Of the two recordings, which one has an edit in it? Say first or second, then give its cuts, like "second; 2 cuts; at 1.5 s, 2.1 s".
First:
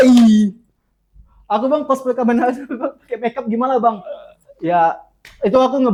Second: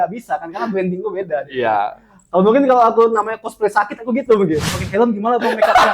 second; 1 cut; at 4.6 s